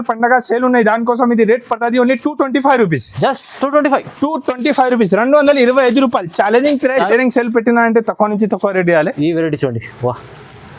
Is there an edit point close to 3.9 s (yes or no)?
no